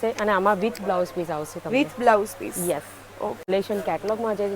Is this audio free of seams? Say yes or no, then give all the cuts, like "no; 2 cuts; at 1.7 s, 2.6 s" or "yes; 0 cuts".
no; 1 cut; at 3.5 s